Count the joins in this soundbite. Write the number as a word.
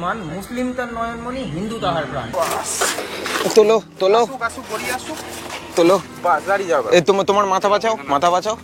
one